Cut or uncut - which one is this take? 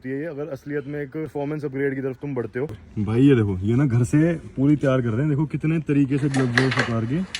cut